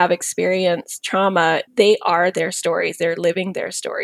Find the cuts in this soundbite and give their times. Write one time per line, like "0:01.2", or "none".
0:01.7